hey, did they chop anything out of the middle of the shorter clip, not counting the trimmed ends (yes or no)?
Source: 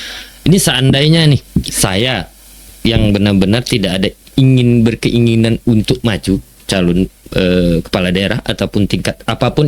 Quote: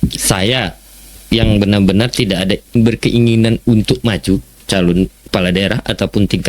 yes